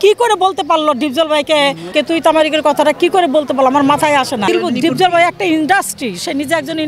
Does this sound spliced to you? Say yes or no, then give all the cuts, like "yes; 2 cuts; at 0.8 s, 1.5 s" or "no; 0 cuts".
yes; 2 cuts; at 1.9 s, 4.5 s